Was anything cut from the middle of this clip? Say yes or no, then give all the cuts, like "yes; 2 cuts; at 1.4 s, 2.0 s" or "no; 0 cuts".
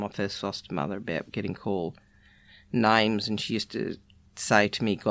no; 0 cuts